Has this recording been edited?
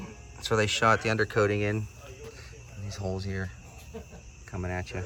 no; 0 cuts

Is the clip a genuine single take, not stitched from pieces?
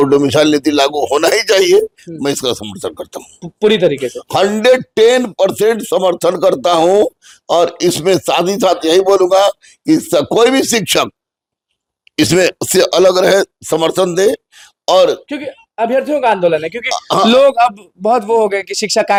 yes; 0 cuts

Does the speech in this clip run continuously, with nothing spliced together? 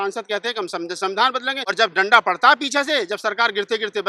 no; 1 cut; at 1.6 s

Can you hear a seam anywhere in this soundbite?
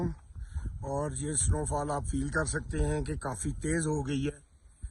no; 0 cuts

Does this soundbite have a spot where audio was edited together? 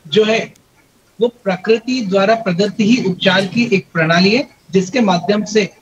no; 0 cuts

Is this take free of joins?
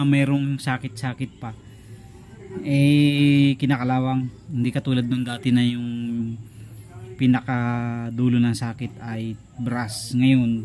yes; 0 cuts

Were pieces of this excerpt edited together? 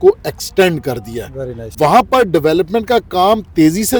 no; 0 cuts

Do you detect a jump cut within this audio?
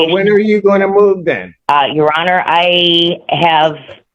yes; 1 cut; at 1.5 s

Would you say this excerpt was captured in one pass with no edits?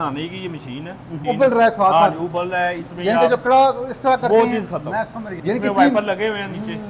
no; 2 cuts; at 1.2 s, 5.3 s

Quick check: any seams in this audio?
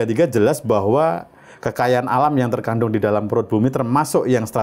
no; 0 cuts

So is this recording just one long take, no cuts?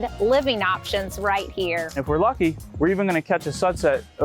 no; 1 cut; at 2.0 s

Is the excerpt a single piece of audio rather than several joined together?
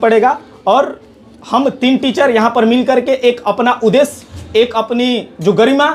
yes; 0 cuts

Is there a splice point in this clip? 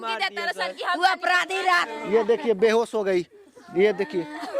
yes; 1 cut; at 1.9 s

